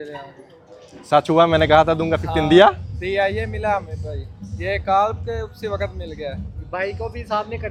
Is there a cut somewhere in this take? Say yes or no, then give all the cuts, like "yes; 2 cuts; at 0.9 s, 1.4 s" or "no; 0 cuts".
no; 0 cuts